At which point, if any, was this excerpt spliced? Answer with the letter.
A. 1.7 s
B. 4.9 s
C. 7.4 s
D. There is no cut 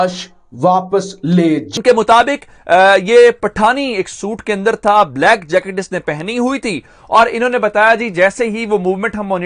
A